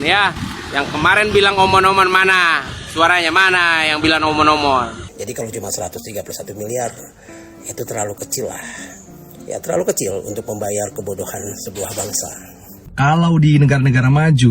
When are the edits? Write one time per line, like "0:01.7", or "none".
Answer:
0:05.1
0:12.8